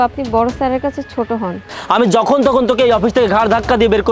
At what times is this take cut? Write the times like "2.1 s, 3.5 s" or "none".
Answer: 1.6 s